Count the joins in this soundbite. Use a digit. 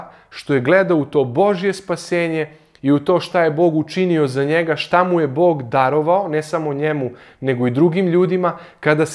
0